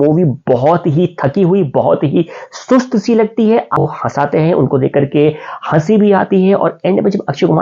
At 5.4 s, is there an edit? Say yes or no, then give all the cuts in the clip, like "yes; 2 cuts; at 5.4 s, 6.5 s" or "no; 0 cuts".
no; 1 cut; at 3.8 s